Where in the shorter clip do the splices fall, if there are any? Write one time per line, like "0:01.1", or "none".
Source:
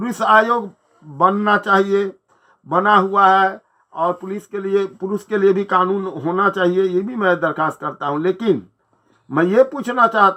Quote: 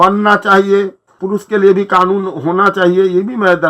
0:01.2

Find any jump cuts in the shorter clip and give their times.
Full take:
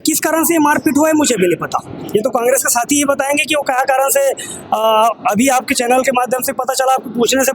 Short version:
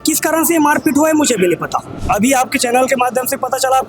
0:02.0

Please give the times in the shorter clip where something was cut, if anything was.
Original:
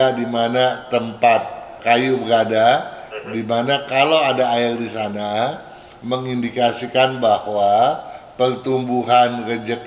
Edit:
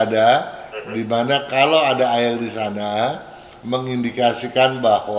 none

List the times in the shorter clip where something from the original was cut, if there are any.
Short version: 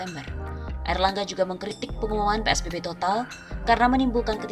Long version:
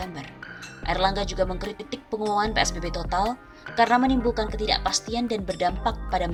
0:01.8

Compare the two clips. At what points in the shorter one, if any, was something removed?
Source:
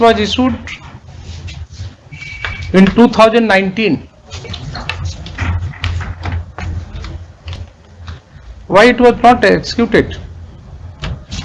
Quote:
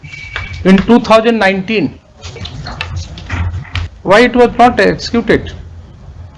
0:03.9

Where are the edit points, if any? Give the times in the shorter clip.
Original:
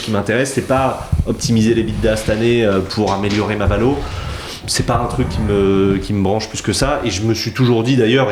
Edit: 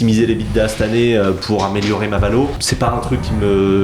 0:02.6

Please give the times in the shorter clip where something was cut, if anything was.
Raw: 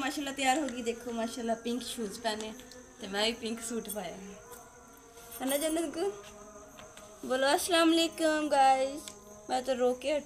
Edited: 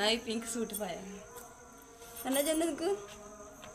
none

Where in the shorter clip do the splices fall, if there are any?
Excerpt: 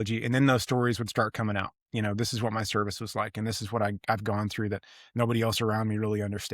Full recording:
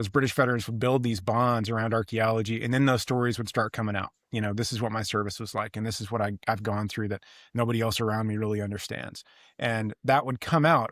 none

